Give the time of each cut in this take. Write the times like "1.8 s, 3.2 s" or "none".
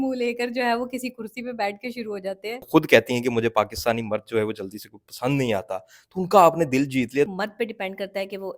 2.6 s, 7.3 s